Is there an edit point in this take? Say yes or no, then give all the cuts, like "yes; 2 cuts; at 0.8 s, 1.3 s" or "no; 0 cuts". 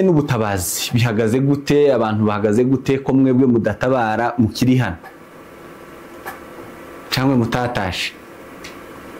no; 0 cuts